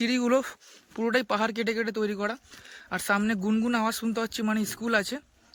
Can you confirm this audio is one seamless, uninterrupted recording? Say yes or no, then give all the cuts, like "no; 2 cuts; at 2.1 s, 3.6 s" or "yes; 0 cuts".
yes; 0 cuts